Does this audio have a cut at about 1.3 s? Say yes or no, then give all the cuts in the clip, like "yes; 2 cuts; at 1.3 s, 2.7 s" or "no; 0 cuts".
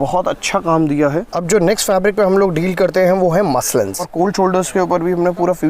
yes; 2 cuts; at 1.3 s, 4.1 s